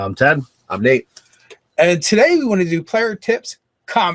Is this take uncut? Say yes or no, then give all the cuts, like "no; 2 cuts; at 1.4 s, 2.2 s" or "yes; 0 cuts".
no; 1 cut; at 3.2 s